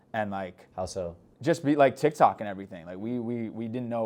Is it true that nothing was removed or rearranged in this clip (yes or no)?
yes